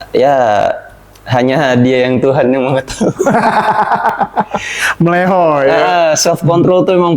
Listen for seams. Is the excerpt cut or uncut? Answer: uncut